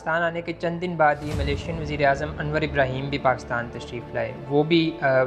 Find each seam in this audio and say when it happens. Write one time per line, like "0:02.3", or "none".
none